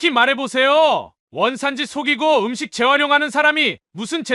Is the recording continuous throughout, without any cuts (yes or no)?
yes